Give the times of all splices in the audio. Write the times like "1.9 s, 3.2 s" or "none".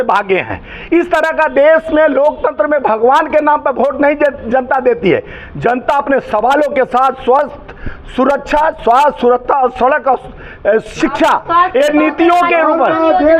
none